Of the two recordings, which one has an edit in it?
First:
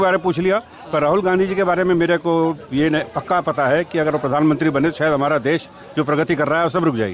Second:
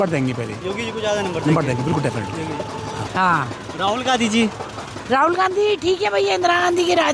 second; 1 cut; at 3.0 s

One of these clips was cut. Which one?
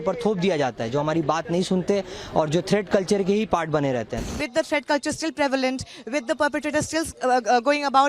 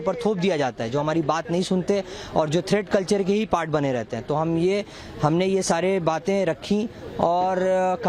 first; 1 cut; at 4.3 s

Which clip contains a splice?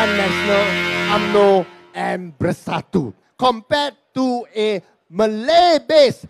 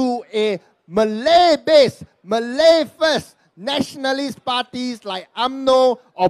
first; 1 cut; at 3.2 s

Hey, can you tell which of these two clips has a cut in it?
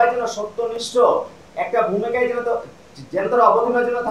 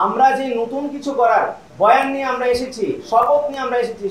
second; 1 cut; at 1.6 s

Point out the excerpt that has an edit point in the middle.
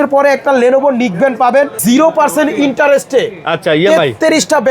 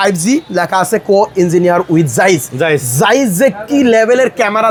first; 1 cut; at 1.8 s

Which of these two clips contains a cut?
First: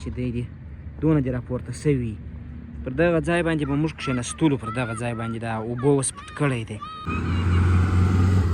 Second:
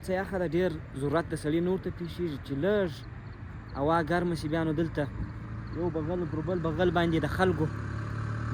first; 1 cut; at 7.0 s

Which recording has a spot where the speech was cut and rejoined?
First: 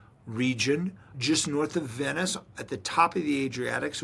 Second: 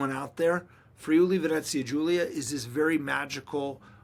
first; 1 cut; at 1.1 s

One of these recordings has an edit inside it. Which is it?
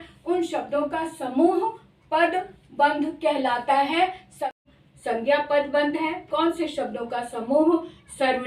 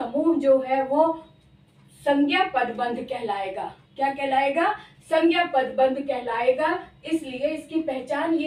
first; 1 cut; at 4.6 s

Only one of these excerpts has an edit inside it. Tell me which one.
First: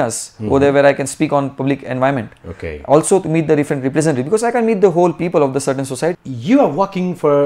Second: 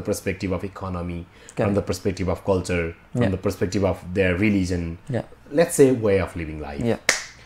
first; 1 cut; at 6.3 s

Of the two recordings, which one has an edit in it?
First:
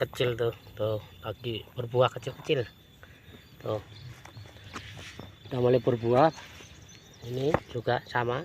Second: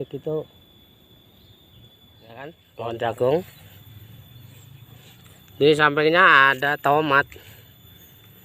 second; 1 cut; at 2.6 s

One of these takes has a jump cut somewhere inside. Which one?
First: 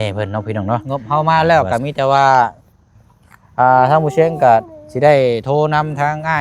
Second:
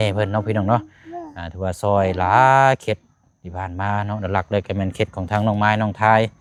first; 1 cut; at 0.9 s

